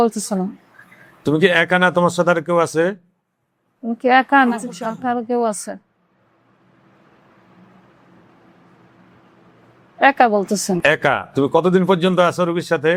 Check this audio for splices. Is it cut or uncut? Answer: uncut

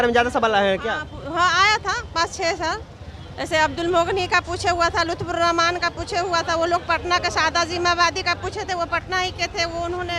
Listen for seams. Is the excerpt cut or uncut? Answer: uncut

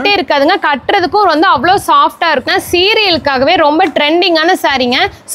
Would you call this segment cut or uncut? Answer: cut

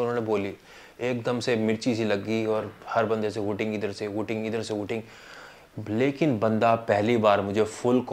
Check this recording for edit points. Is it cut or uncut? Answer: uncut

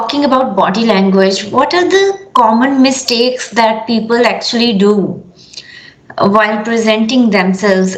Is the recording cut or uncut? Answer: uncut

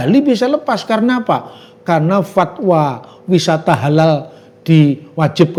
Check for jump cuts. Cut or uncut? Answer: uncut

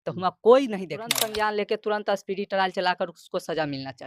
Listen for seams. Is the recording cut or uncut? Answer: cut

